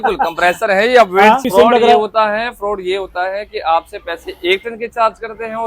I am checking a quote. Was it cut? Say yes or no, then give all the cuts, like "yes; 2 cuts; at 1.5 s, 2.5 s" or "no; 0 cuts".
yes; 1 cut; at 1.4 s